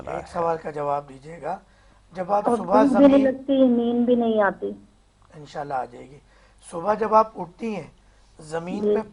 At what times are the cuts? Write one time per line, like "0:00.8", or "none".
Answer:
none